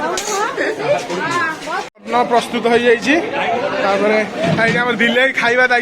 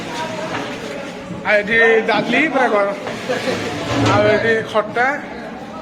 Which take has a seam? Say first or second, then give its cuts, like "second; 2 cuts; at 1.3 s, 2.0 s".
first; 1 cut; at 1.9 s